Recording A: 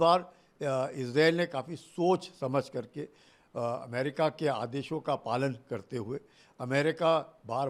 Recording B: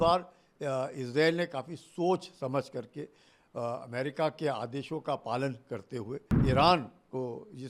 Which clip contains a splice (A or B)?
B